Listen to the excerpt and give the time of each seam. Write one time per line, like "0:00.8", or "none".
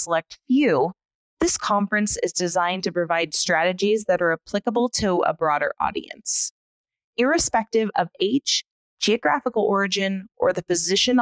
none